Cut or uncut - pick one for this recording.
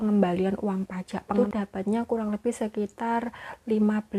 cut